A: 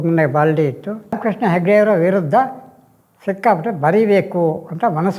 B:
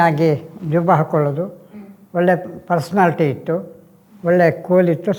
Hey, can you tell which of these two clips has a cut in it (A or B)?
A